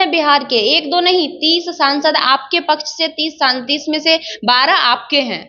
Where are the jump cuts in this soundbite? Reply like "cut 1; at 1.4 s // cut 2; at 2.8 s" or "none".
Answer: none